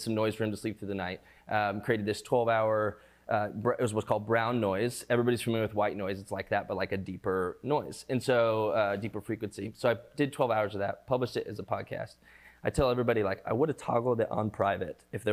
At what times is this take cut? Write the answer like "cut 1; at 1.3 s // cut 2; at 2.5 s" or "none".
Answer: none